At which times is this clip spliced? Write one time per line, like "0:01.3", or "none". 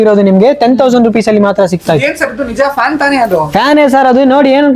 none

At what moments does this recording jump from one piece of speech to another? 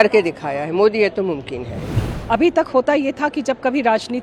0:02.0

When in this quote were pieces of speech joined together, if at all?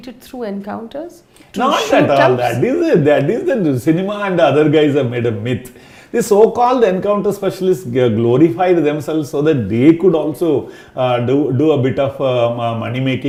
none

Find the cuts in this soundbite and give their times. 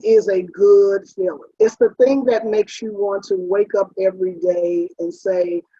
0:01.4

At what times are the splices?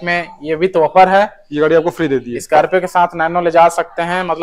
none

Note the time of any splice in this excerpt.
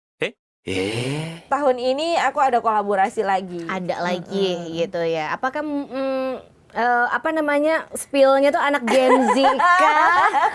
0:01.4

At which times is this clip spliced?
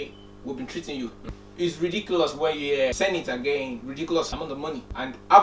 0:01.3
0:02.9
0:04.4

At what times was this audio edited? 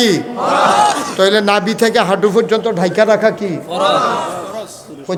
none

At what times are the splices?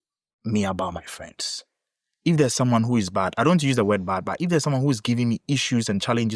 none

